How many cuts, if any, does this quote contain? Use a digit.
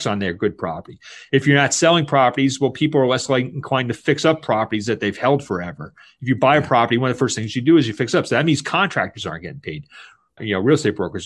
0